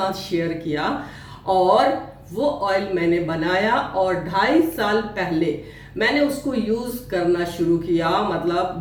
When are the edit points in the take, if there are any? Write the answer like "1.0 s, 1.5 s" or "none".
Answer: none